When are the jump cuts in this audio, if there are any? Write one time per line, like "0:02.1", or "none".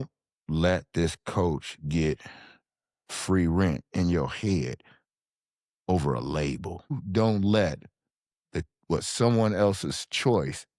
0:07.0